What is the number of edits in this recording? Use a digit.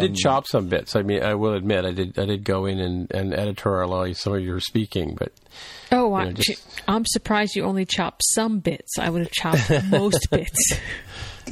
0